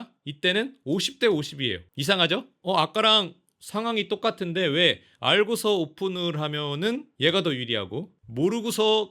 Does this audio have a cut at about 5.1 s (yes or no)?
no